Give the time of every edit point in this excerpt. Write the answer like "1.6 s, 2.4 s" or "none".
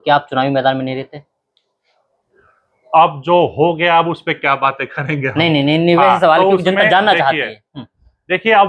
none

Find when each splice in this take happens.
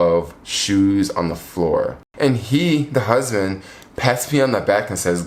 2.0 s

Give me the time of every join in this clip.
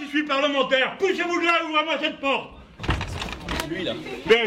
3.4 s

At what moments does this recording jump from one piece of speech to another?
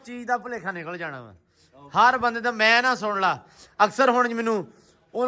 none

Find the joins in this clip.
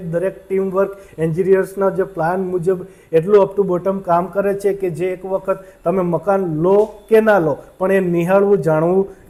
none

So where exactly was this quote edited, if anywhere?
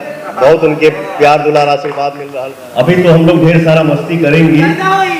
2.1 s

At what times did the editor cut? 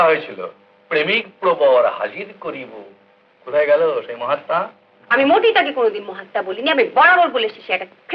none

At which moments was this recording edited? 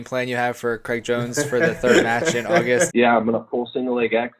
2.9 s

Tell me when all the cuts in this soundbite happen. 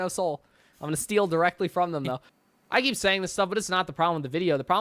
2.3 s

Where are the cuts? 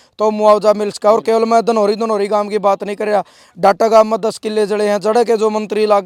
none

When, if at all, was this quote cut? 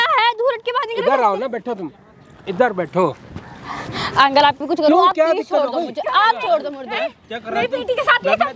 4.6 s

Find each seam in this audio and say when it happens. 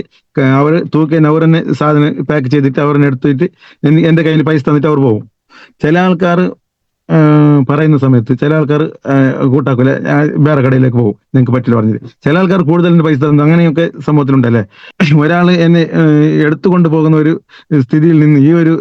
14.8 s

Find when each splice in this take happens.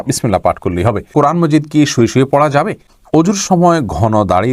1.1 s, 2.9 s

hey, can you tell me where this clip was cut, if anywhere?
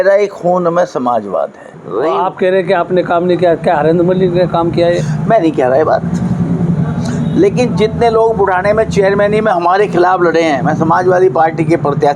1.8 s

